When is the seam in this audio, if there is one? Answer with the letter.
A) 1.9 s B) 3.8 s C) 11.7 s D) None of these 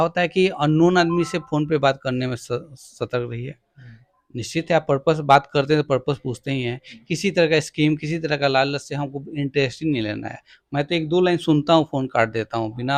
D